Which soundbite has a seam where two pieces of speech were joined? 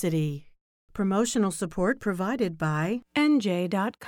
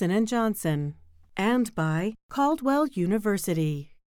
second; 2 cuts; at 1.1 s, 2.2 s

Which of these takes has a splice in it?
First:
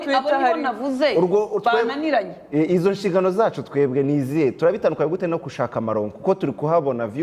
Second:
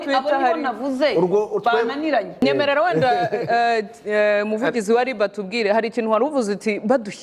second; 1 cut; at 2.3 s

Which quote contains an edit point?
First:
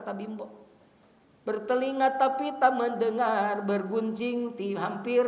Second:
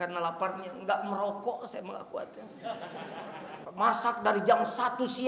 second; 1 cut; at 3.6 s

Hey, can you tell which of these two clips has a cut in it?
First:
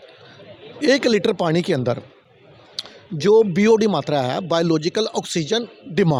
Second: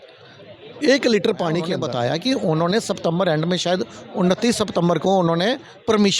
second; 1 cut; at 1.8 s

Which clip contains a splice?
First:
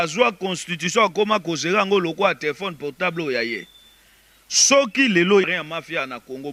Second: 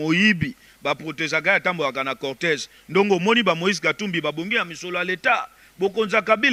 first; 1 cut; at 5.4 s

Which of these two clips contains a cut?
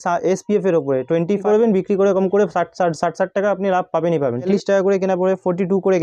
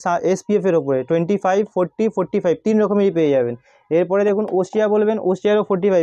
first; 2 cuts; at 1.4 s, 4.5 s

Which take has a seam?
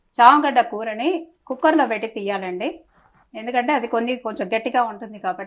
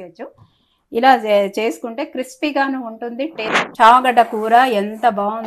second; 1 cut; at 3.6 s

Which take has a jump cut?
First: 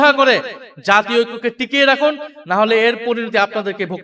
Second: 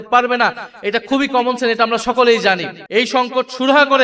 second; 1 cut; at 2.7 s

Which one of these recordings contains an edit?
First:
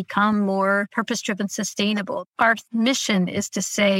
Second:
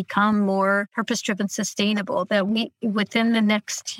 first; 1 cut; at 2.2 s

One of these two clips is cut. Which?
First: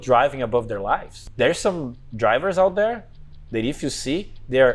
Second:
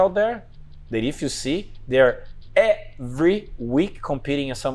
first; 1 cut; at 1.2 s

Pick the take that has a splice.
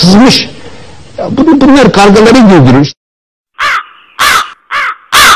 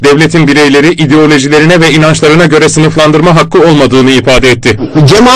first; 1 cut; at 3.2 s

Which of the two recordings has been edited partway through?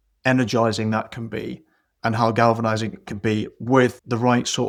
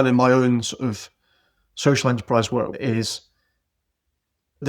second; 1 cut; at 2.8 s

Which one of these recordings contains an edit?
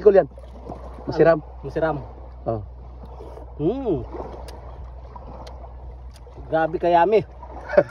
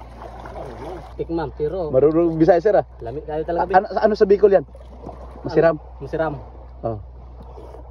second; 1 cut; at 1.1 s

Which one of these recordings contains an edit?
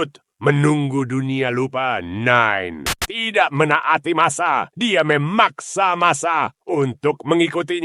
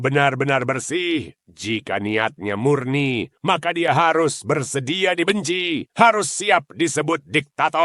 first; 1 cut; at 3.0 s

